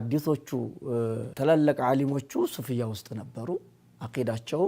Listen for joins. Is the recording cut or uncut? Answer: cut